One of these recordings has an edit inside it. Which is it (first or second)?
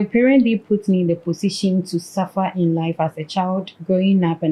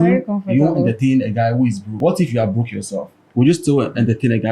second